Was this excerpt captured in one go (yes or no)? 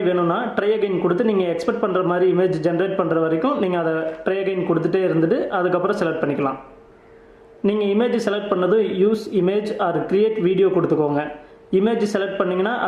no